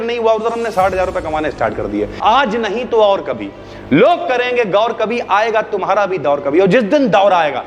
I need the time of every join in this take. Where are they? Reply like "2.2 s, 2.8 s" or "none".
2.1 s